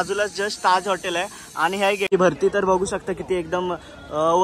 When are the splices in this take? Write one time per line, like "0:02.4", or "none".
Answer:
0:02.1